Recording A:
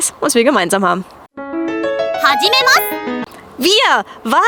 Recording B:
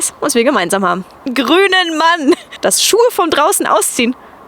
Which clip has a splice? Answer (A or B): B